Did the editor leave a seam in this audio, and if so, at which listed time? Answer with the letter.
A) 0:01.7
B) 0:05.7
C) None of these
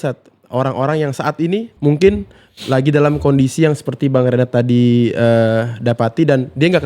A